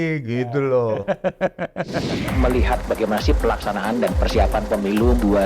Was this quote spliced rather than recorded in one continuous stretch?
yes; 1 cut; at 2.3 s

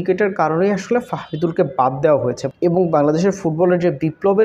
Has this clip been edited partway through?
yes; 1 cut; at 2.5 s

